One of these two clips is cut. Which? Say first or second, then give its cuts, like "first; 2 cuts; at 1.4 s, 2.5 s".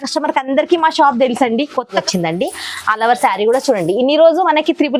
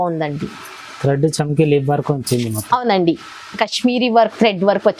first; 1 cut; at 1.9 s